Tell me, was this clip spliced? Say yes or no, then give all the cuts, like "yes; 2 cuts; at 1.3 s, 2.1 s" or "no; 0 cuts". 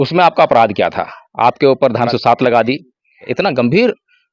yes; 2 cuts; at 2.1 s, 3.2 s